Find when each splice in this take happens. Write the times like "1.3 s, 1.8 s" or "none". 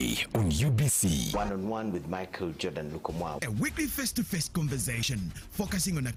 none